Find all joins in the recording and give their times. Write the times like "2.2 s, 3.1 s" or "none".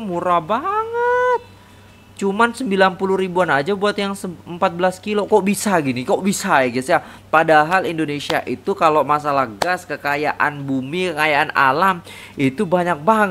none

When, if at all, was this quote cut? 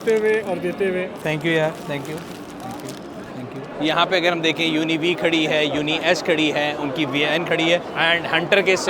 3.7 s, 7.9 s

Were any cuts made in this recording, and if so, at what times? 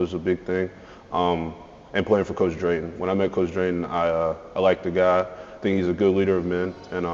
none

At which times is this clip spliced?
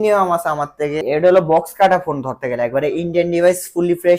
1.0 s

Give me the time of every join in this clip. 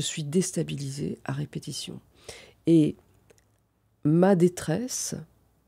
none

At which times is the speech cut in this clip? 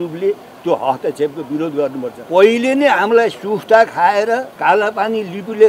2.2 s, 4.5 s

